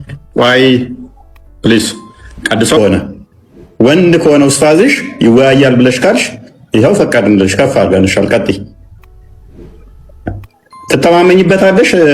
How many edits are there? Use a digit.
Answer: 1